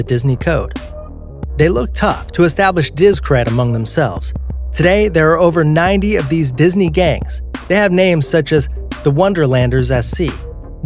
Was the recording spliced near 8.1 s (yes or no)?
no